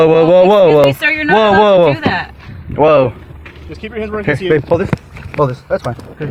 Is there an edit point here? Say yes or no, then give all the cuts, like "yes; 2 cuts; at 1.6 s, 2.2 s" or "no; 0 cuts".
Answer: no; 0 cuts